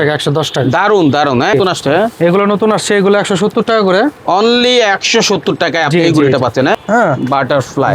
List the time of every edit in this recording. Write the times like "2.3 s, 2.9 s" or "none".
1.5 s, 6.8 s